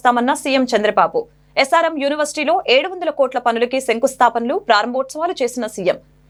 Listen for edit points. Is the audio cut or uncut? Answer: uncut